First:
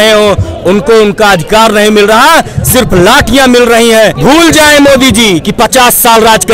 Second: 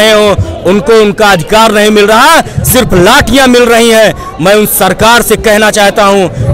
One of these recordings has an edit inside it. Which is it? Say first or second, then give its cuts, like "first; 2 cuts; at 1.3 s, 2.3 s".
first; 1 cut; at 4.2 s